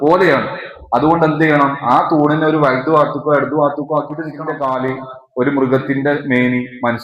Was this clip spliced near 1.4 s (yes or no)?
no